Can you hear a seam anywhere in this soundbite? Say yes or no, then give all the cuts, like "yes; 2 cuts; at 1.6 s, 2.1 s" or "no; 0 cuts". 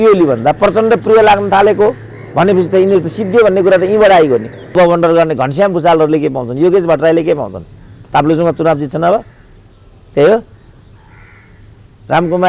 yes; 1 cut; at 4.7 s